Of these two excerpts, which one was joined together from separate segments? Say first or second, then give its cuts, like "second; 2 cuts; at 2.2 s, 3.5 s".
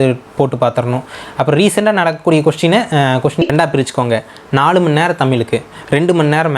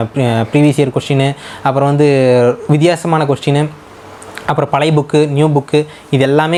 first; 1 cut; at 3.4 s